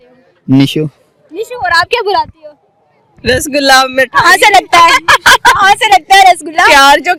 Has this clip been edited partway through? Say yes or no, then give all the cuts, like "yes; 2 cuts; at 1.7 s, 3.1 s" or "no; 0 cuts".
no; 0 cuts